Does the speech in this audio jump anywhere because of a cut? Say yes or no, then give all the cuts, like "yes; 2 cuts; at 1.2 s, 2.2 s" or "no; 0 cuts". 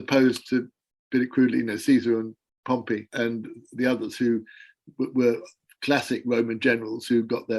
yes; 1 cut; at 3.1 s